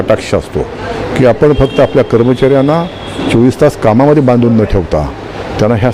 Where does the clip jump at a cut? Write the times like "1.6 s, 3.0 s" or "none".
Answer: none